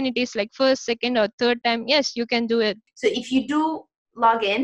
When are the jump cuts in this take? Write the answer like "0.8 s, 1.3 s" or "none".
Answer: 2.9 s